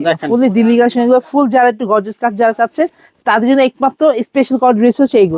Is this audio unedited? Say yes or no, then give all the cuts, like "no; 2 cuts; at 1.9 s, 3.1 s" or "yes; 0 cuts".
yes; 0 cuts